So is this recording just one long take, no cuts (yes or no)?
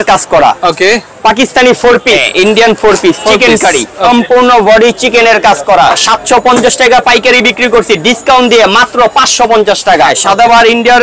no